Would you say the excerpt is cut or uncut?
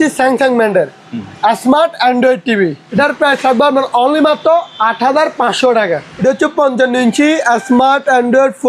cut